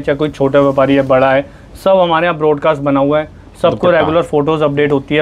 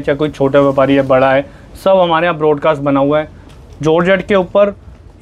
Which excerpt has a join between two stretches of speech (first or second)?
second